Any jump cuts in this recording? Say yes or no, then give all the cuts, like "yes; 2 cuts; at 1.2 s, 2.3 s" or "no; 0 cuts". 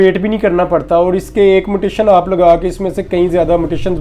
no; 0 cuts